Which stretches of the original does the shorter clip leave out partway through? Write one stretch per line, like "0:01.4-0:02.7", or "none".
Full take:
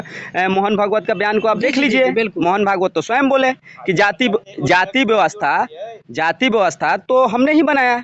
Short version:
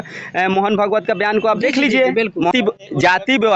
0:02.5-0:04.2